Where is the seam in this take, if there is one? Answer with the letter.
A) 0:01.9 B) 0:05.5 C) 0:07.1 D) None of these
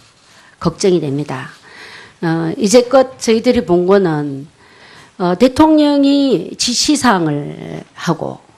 D